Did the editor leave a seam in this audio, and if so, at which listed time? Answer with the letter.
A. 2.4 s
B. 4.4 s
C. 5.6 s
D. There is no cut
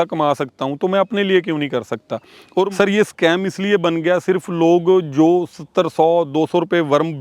A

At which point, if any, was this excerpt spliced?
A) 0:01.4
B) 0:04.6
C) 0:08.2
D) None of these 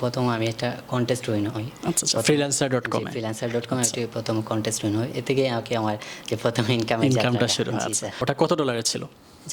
C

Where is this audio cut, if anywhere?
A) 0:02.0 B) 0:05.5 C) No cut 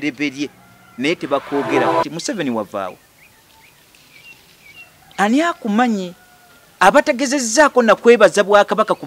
A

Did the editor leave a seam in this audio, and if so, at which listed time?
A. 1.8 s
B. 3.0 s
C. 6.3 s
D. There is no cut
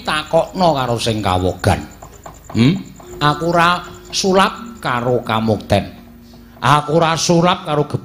B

